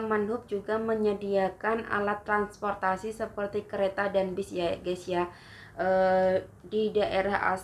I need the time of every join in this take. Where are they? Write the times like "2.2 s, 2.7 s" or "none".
none